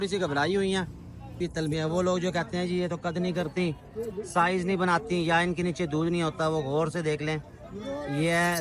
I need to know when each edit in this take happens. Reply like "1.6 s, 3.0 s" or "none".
1.4 s